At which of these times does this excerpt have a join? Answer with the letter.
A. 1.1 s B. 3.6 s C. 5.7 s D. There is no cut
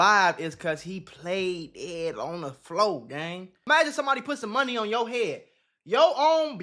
B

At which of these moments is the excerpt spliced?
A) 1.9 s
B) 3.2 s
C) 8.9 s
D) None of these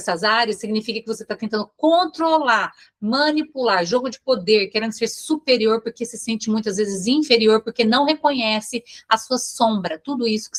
D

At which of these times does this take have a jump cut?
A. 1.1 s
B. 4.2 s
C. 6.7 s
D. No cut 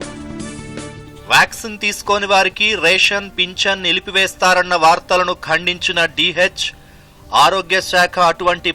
A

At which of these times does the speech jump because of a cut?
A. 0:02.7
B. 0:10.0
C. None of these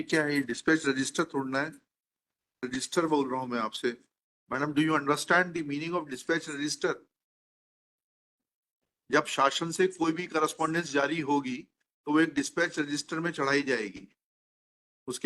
A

